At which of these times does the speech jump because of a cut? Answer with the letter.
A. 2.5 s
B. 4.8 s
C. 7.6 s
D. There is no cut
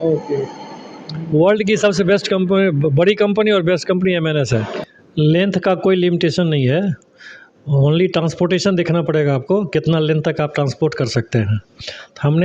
B